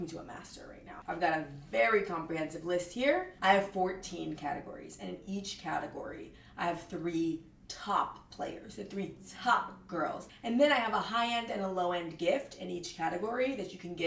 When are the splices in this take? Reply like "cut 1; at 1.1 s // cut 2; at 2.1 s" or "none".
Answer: cut 1; at 1.0 s // cut 2; at 3.3 s // cut 3; at 10.2 s